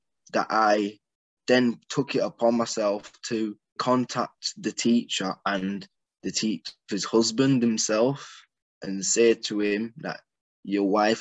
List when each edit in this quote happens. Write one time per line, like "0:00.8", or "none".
0:03.8